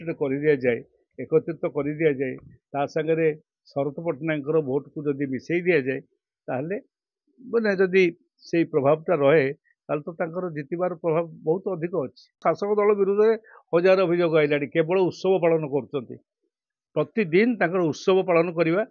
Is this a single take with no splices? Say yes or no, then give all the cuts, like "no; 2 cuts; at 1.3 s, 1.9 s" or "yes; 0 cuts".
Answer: no; 1 cut; at 12.4 s